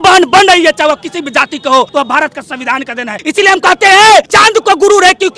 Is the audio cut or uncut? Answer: cut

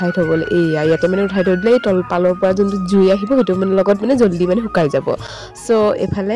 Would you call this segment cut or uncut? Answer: uncut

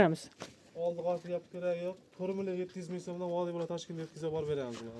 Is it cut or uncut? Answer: uncut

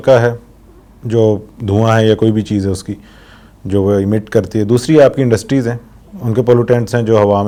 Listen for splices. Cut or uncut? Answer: uncut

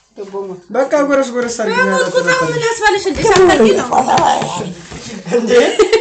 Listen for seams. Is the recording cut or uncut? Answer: uncut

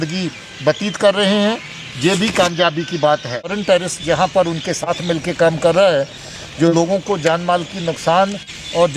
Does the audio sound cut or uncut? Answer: cut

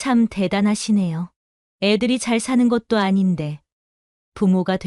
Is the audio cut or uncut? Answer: uncut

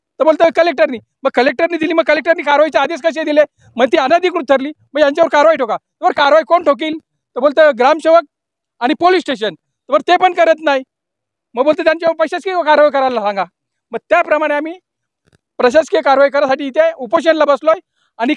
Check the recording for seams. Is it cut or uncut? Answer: uncut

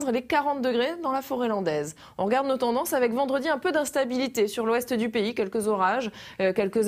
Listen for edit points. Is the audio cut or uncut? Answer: cut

